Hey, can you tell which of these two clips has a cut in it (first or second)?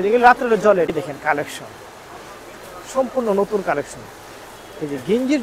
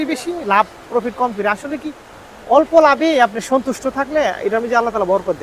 first